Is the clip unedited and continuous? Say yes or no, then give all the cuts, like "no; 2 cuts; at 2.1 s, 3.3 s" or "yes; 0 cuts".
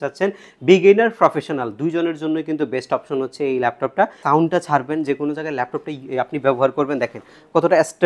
no; 1 cut; at 4.2 s